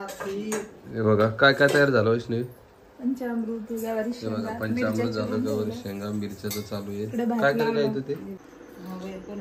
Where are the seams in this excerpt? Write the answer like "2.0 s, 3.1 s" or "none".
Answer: 8.4 s